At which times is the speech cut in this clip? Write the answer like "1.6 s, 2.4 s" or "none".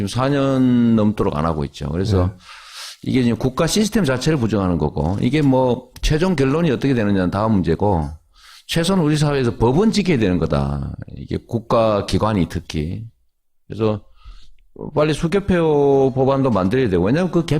4.4 s